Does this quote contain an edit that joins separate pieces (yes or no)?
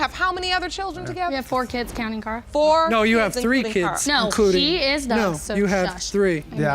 no